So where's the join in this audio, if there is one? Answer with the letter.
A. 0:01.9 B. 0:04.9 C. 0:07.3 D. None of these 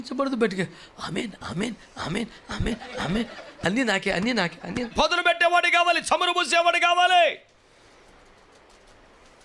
B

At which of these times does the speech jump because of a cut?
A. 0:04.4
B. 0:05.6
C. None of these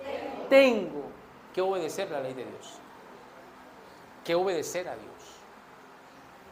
C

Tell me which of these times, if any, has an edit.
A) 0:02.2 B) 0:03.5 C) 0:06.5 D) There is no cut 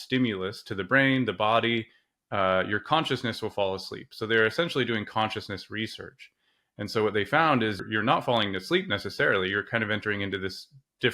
D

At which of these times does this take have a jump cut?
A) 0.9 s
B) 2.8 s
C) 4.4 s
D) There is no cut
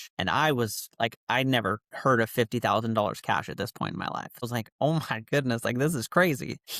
C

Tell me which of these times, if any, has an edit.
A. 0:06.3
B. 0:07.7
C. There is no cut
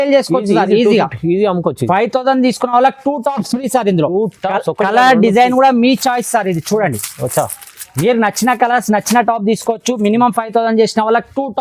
C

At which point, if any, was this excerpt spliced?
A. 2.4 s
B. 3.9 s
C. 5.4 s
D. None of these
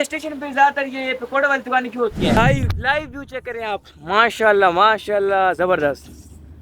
A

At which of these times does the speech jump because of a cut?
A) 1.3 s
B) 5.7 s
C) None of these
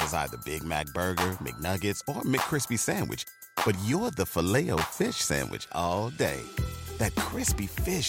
C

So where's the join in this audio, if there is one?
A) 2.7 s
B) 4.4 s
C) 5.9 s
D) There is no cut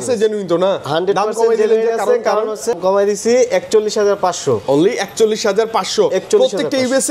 A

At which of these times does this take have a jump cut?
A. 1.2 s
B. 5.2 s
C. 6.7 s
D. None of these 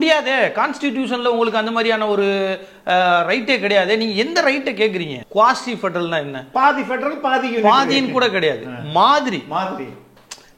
B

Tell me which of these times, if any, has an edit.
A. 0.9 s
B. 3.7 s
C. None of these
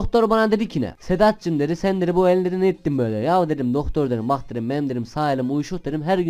A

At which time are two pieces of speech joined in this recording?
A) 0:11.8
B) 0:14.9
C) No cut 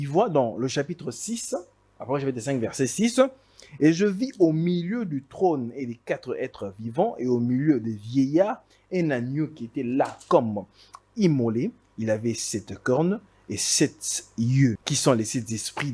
B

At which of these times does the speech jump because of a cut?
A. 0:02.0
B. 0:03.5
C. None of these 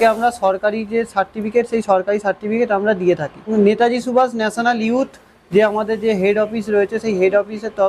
B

